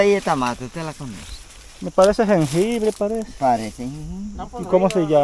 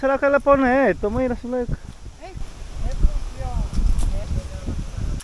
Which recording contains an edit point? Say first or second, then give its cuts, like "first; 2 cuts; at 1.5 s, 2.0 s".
second; 2 cuts; at 2.4 s, 4.2 s